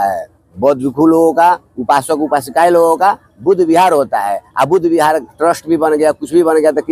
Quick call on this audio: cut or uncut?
uncut